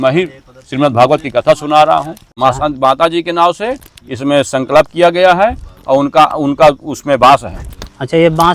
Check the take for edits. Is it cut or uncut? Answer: cut